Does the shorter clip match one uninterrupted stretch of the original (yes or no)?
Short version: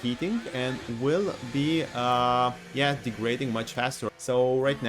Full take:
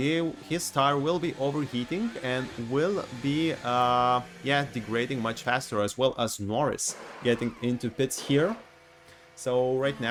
no